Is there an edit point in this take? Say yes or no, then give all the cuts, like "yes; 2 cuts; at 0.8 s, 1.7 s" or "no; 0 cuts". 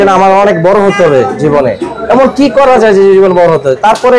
no; 0 cuts